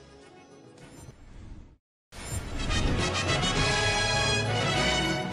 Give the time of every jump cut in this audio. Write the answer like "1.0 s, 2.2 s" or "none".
1.2 s